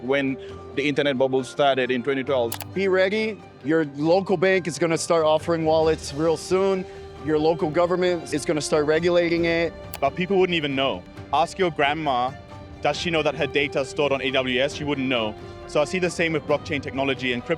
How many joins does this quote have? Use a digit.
3